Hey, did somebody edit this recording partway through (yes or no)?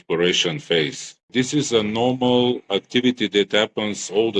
yes